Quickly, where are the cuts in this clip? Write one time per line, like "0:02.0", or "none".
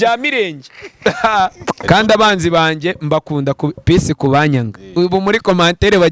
0:01.8